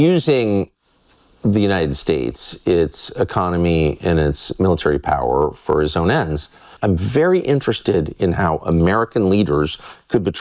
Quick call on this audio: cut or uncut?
cut